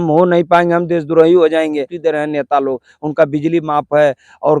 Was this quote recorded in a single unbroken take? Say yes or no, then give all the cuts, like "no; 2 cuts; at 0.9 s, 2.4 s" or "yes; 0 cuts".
no; 1 cut; at 1.9 s